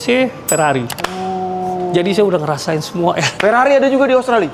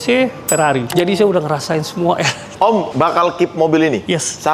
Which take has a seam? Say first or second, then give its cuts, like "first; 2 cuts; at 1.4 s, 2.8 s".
second; 2 cuts; at 0.9 s, 2.4 s